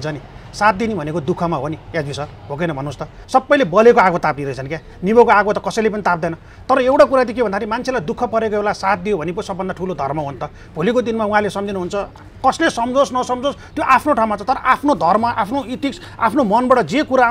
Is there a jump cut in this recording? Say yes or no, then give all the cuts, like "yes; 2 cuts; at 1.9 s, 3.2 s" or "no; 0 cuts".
yes; 1 cut; at 3.2 s